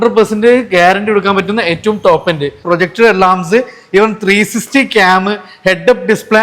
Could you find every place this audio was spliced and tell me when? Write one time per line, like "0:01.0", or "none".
0:02.6